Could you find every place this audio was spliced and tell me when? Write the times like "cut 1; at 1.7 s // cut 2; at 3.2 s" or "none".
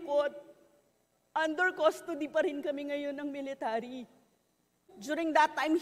cut 1; at 4.8 s